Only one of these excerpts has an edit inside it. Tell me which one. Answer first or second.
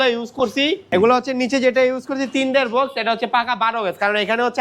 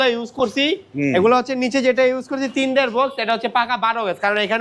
first